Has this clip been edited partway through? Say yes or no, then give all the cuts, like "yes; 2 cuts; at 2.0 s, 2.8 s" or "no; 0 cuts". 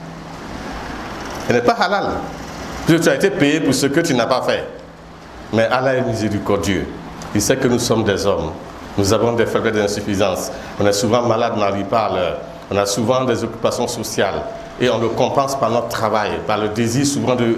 no; 0 cuts